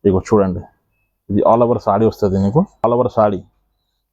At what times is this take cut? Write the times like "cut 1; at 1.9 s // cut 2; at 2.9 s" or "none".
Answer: cut 1; at 2.8 s